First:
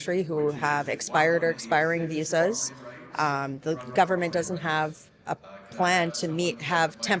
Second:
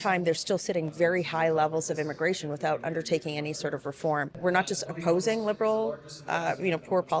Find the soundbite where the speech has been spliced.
second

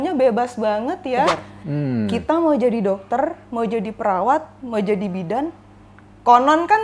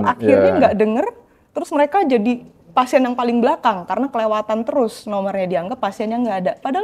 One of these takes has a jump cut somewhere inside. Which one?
first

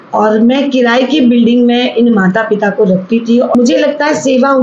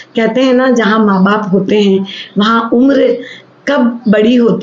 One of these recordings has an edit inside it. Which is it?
first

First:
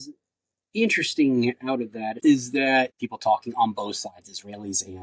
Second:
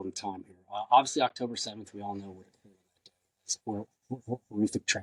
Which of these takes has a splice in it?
first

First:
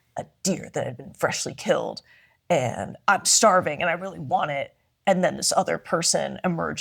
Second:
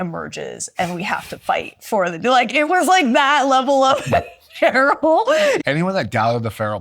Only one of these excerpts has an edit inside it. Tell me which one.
second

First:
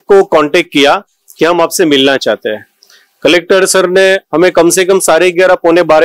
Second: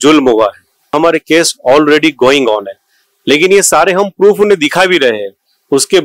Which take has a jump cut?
second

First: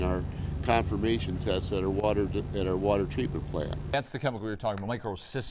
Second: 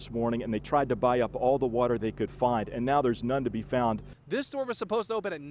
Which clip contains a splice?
second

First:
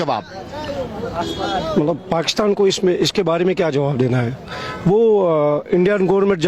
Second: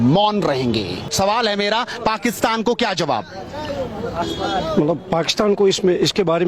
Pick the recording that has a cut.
second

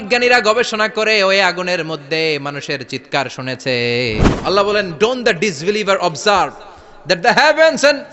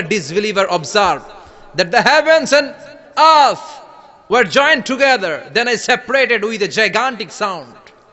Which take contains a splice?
first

